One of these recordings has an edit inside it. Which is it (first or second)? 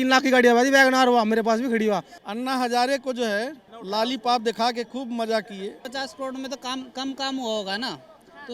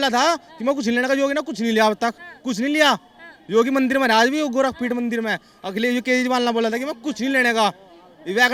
first